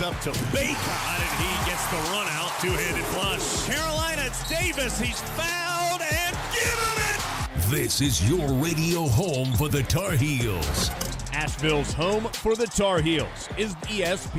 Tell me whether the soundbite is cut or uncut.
uncut